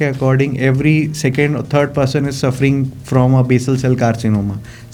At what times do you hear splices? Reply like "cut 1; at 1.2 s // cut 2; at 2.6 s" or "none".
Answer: none